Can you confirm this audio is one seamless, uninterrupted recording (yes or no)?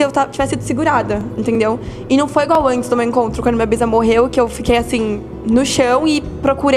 yes